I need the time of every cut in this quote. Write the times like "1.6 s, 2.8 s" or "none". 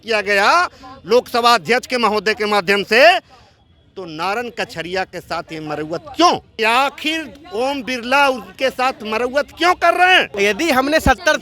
6.5 s, 10.3 s